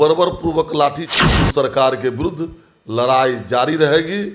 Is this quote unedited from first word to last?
no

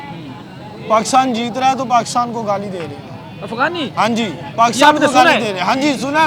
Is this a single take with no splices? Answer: yes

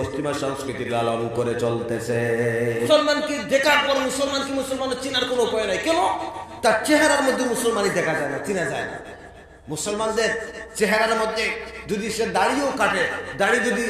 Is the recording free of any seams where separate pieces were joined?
no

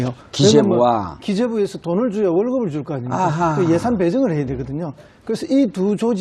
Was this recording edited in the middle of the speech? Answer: no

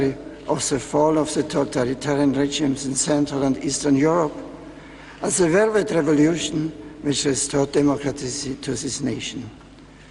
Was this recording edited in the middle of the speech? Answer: yes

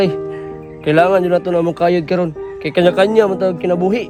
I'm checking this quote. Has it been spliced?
no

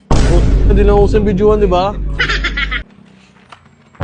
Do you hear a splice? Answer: yes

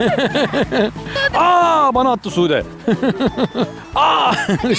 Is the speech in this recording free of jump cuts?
no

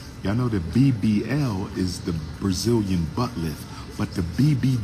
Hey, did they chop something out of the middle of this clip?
no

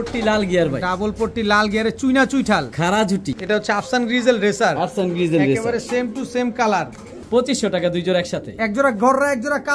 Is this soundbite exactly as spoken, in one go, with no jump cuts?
no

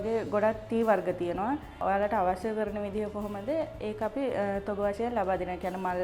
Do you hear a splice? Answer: yes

